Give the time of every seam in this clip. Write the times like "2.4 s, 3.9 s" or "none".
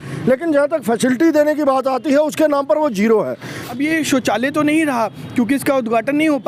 3.6 s